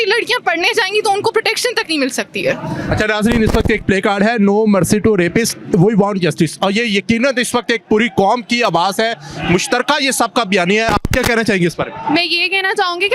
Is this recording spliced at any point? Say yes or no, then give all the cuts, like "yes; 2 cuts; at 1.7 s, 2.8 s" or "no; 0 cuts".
no; 0 cuts